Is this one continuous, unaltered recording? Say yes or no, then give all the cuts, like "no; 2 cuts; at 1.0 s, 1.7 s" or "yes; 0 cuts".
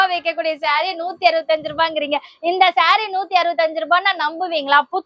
yes; 0 cuts